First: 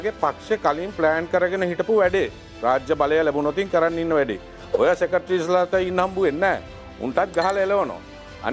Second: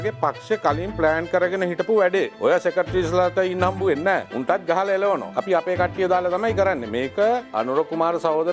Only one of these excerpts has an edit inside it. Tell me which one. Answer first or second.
second